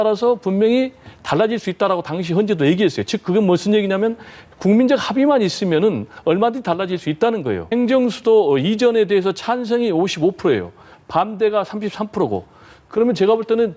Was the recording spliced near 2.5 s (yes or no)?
no